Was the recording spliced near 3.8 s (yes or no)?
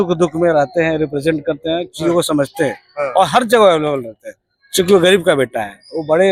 no